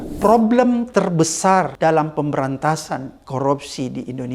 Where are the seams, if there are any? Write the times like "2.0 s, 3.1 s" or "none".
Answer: 0.9 s, 1.7 s